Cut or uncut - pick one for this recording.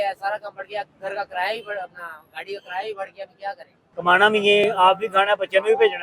cut